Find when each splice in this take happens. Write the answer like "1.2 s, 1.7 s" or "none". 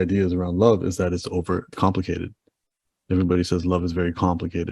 1.7 s

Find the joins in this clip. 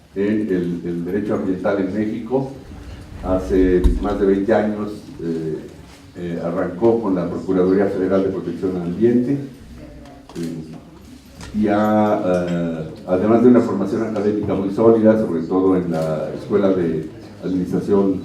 3.1 s

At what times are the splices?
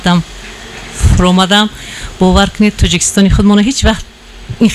none

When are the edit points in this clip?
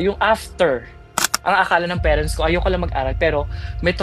1.3 s

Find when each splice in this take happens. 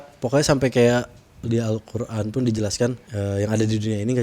1.4 s, 3.1 s

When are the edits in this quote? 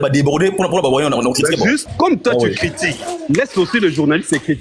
1.8 s

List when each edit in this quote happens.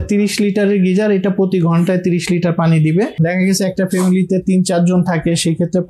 3.3 s

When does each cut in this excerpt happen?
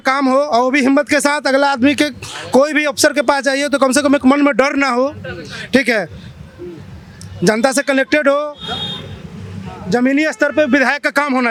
none

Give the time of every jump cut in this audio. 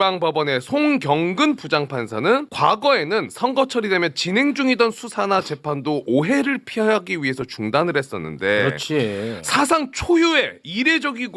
2.5 s

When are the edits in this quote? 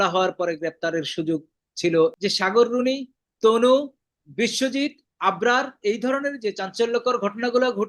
2.1 s

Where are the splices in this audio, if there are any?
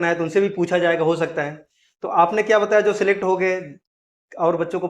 none

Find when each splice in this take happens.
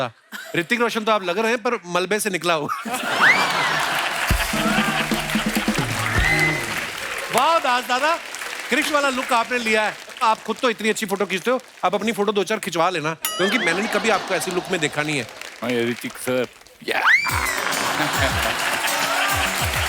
none

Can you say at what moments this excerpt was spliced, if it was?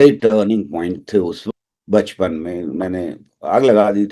1.4 s

